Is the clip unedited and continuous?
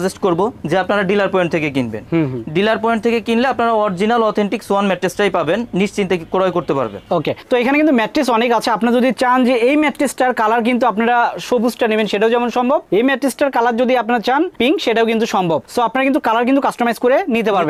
yes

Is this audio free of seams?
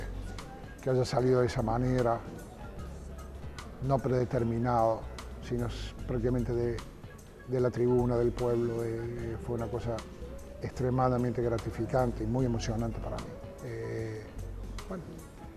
yes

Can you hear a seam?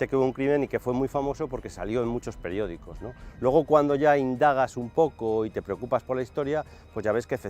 no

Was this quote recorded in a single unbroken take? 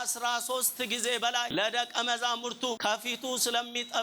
no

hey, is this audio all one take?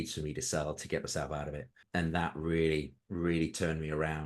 no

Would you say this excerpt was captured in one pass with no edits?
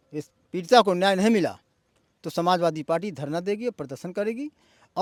yes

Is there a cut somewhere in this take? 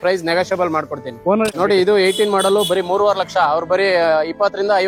yes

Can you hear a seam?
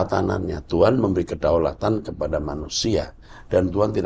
no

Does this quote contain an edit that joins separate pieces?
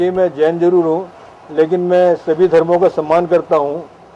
yes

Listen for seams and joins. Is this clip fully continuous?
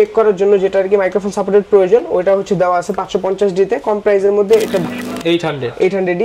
no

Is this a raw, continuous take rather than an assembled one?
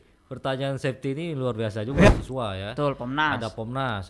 no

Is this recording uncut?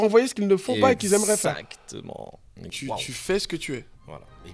no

